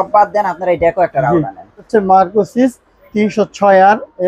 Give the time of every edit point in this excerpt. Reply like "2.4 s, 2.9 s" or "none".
1.9 s